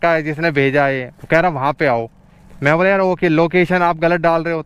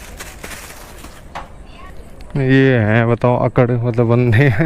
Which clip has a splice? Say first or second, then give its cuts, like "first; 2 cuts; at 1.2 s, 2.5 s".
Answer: second; 1 cut; at 1.9 s